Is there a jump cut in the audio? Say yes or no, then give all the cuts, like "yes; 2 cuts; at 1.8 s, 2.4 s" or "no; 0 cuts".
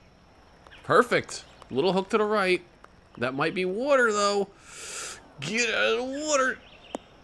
no; 0 cuts